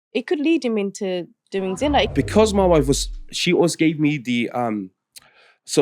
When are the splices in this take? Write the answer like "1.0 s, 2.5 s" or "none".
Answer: 2.1 s